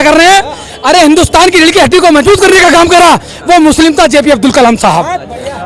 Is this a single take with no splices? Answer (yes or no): yes